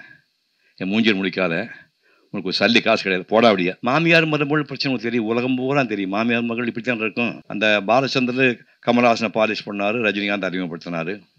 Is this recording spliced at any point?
yes; 2 cuts; at 3.8 s, 7.4 s

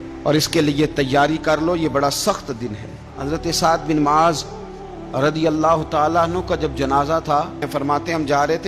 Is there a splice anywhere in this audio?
yes; 2 cuts; at 3.1 s, 7.7 s

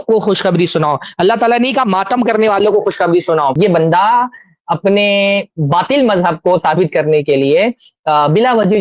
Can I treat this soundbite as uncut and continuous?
no; 1 cut; at 3.5 s

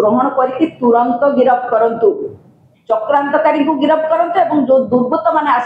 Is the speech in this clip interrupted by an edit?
no; 0 cuts

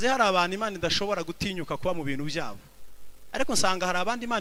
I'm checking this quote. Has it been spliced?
no; 0 cuts

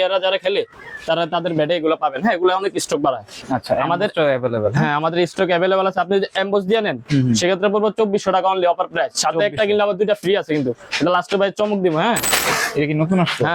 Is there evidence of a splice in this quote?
yes; 2 cuts; at 3.3 s, 12.3 s

